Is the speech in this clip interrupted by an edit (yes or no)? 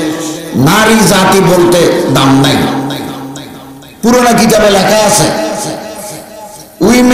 no